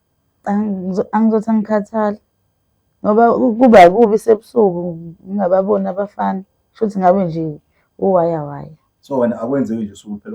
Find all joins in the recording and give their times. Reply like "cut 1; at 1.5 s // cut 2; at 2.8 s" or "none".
none